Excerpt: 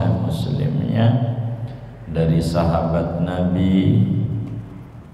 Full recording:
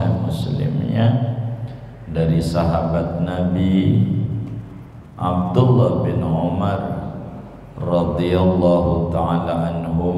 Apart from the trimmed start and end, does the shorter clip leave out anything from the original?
no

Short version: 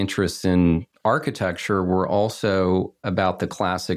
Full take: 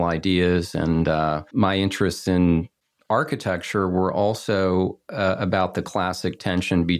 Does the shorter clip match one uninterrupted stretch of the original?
no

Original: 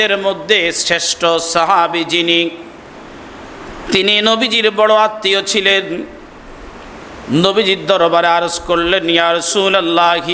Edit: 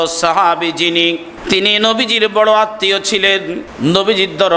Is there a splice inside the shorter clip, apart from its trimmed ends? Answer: yes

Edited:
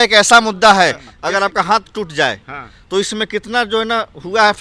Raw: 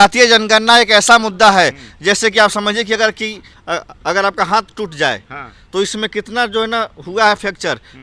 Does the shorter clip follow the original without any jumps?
no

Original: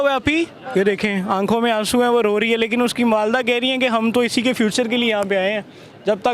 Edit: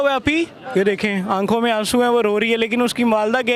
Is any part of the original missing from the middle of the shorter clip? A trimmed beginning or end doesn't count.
no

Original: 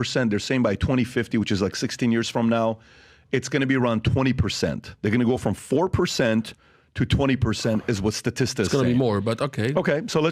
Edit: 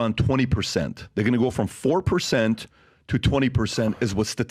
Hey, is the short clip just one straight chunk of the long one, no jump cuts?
yes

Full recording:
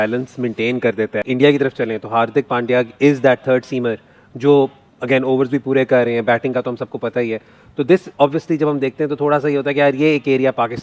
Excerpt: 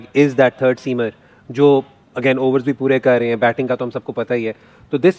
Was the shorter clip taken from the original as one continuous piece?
yes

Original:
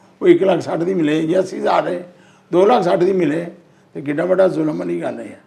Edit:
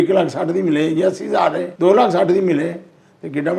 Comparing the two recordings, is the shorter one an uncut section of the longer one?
no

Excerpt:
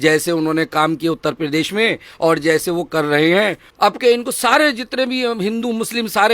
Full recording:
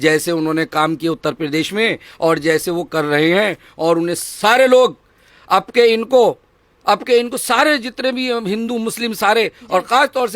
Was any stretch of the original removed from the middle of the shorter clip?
yes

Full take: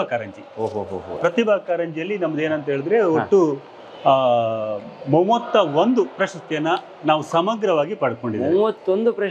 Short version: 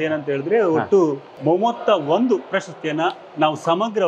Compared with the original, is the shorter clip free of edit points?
no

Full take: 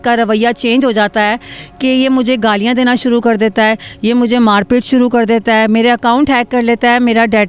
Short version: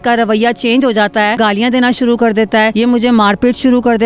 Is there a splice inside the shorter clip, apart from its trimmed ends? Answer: yes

